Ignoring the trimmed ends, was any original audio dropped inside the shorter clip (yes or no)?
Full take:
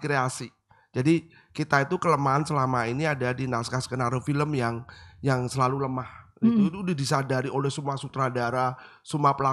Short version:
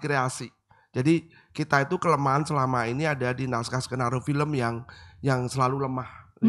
no